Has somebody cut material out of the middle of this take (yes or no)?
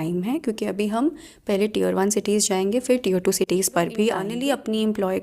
yes